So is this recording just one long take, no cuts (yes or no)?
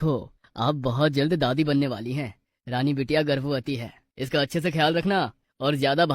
yes